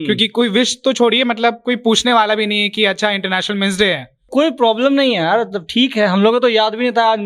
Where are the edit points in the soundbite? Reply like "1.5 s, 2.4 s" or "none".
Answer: 4.3 s

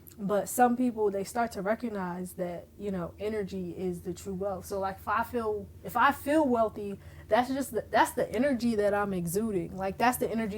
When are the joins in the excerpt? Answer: none

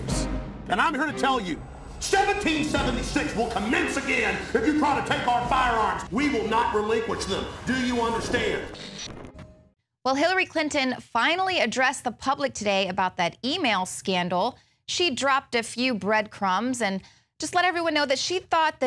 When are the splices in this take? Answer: none

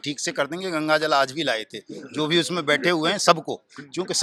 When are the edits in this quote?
none

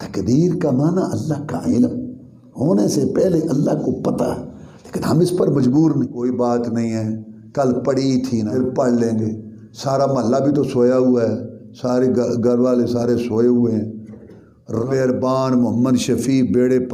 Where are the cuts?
6.2 s, 8.5 s, 14.8 s

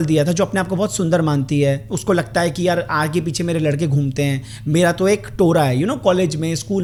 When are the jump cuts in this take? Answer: none

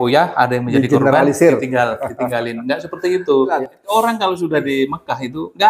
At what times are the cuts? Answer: 3.5 s

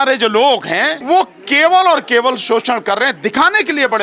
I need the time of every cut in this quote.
0.9 s

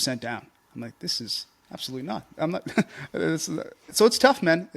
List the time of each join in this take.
3.8 s

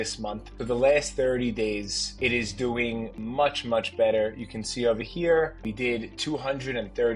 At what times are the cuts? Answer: 3.1 s, 5.6 s

